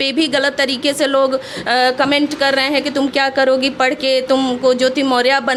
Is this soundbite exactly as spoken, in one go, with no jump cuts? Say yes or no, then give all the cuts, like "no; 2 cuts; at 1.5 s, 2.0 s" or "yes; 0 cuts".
yes; 0 cuts